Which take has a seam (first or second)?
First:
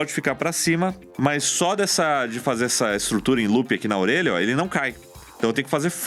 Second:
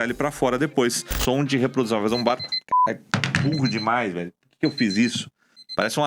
second